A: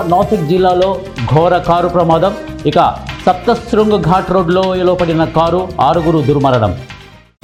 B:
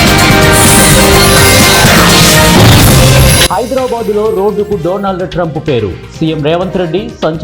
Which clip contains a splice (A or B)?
B